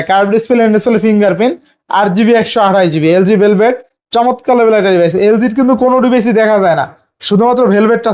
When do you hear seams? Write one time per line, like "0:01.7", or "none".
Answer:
none